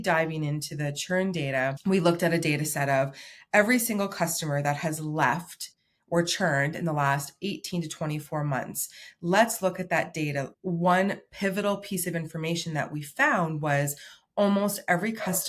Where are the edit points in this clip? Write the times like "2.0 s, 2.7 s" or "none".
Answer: 10.5 s